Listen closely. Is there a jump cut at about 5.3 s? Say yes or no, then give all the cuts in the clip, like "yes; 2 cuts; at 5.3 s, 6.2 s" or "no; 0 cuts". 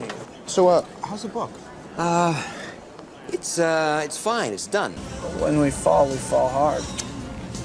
yes; 1 cut; at 5.3 s